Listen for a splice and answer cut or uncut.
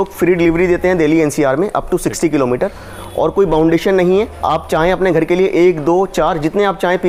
uncut